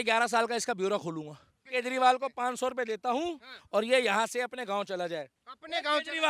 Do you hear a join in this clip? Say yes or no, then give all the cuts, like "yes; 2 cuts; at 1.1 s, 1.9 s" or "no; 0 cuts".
yes; 1 cut; at 1.6 s